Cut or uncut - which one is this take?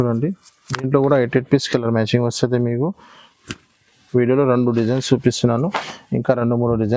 uncut